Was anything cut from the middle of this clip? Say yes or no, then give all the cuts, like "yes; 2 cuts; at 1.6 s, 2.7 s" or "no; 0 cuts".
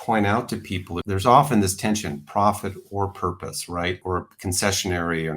yes; 2 cuts; at 0.9 s, 4.0 s